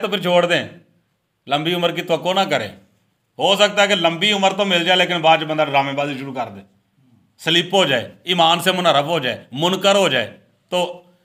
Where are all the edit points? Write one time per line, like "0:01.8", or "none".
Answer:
none